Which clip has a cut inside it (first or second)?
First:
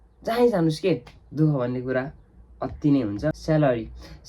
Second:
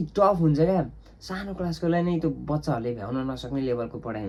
first